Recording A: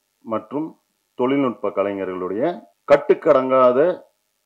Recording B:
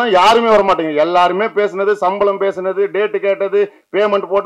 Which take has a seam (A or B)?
A